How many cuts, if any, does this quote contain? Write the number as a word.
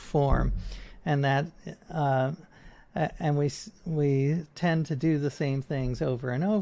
zero